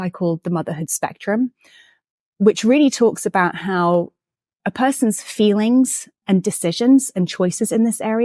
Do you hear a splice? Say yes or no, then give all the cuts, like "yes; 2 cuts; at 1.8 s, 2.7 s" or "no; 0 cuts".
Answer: no; 0 cuts